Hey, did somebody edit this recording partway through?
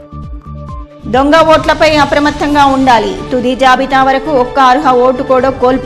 yes; 1 cut; at 1.0 s

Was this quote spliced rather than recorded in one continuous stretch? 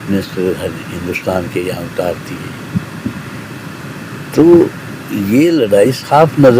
no; 0 cuts

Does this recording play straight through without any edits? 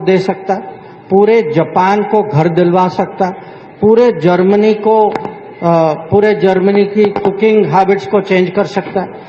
yes; 0 cuts

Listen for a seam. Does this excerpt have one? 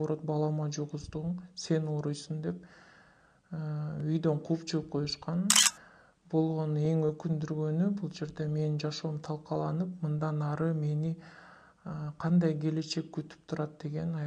yes; 1 cut; at 5.7 s

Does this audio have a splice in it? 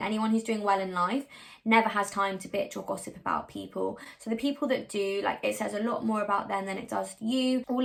no; 0 cuts

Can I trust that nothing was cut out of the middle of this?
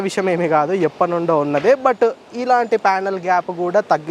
yes; 0 cuts

